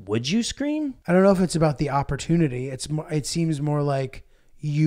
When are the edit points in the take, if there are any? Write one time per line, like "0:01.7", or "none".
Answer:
0:01.0

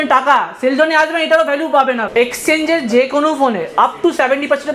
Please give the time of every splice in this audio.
0:02.1

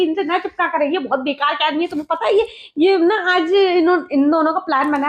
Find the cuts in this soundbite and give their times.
none

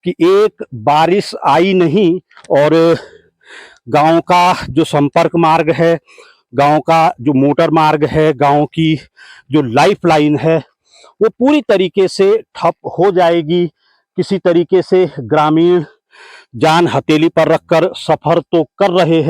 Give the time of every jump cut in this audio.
none

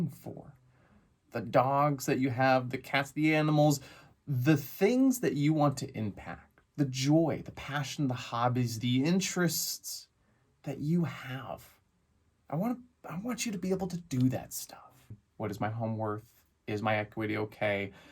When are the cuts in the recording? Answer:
0:15.2

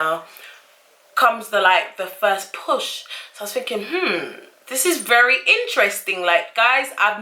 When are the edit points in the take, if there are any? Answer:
0:06.3

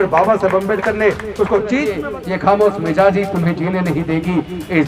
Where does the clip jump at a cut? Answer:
0:02.0

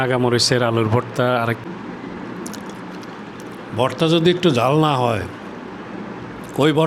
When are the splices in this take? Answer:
0:01.6

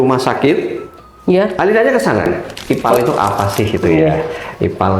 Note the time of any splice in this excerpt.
0:02.5

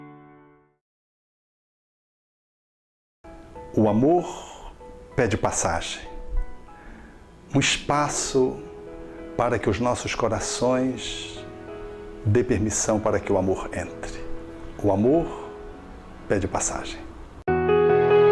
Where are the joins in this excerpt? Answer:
none

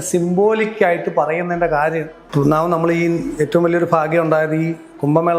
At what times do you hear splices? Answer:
0:02.2

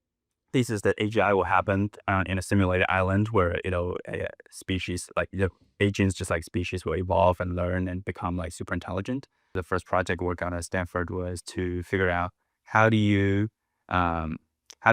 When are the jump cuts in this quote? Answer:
0:09.6

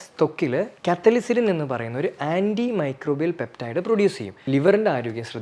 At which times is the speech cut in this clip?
0:04.3

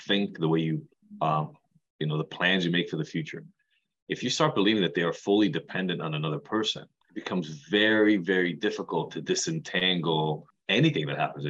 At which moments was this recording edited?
0:10.5

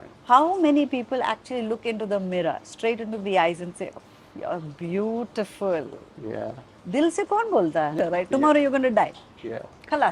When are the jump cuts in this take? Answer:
0:07.9

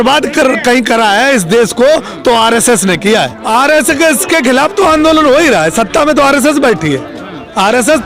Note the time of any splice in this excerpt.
0:03.4

